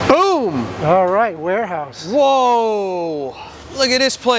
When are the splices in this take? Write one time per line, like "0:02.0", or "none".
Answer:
none